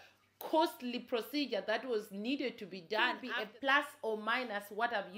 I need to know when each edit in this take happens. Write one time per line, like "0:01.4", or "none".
0:03.2